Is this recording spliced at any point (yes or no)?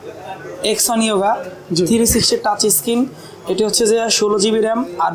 no